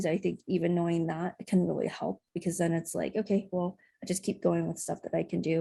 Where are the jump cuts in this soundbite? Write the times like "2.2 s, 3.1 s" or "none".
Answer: none